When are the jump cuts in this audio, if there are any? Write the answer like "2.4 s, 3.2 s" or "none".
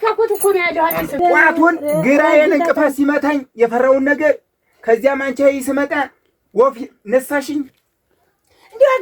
1.4 s